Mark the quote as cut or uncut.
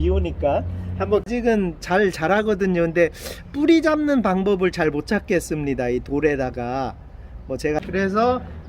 cut